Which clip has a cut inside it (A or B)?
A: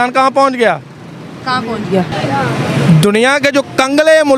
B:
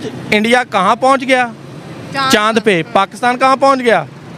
A